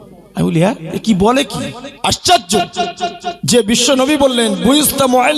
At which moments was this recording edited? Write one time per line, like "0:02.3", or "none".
0:01.8
0:03.3